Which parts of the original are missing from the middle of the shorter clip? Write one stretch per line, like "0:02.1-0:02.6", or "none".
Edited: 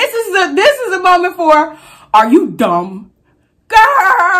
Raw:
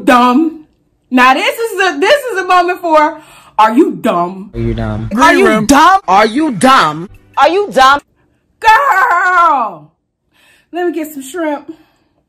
0:04.7-0:08.1